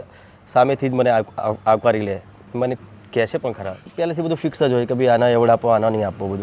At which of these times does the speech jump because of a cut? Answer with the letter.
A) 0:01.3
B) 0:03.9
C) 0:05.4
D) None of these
B